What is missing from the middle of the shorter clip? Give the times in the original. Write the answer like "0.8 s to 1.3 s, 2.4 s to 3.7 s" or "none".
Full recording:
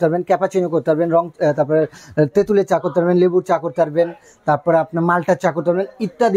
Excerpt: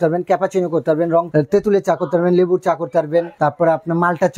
1.3 s to 2.1 s, 4.1 s to 4.4 s